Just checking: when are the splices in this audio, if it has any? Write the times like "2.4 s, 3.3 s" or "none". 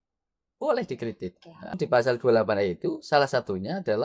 1.8 s